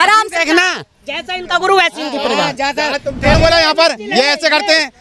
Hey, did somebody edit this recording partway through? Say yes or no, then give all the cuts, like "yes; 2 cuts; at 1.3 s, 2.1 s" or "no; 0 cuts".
yes; 1 cut; at 3.3 s